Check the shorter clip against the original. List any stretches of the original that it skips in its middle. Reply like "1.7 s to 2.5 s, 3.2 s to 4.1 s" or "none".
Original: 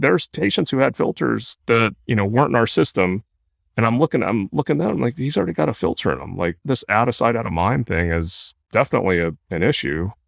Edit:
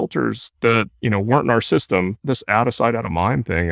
3.2 s to 6.6 s